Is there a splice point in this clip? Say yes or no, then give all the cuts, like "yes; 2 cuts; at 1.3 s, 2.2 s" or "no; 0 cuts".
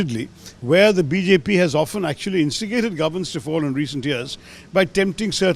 no; 0 cuts